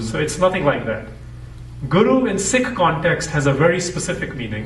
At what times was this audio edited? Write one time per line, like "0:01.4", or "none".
none